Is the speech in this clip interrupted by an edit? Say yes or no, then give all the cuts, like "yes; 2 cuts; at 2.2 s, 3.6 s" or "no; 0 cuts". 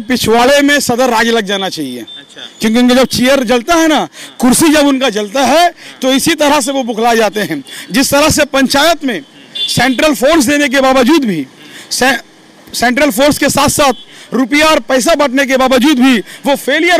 no; 0 cuts